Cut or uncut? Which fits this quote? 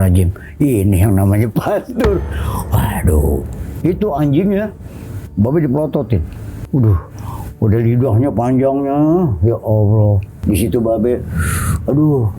cut